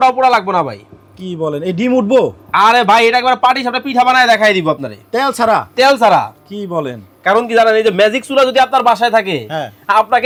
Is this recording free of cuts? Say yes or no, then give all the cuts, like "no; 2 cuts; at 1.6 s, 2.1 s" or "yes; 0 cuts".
yes; 0 cuts